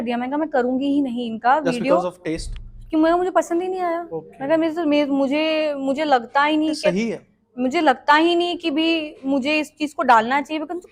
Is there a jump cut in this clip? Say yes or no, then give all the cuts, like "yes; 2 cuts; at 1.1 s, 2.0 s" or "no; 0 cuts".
no; 0 cuts